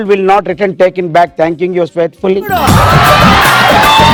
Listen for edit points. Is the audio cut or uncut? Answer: uncut